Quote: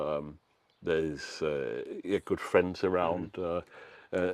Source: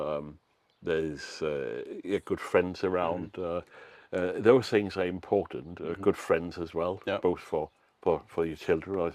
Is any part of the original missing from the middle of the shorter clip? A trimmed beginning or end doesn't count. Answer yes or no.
no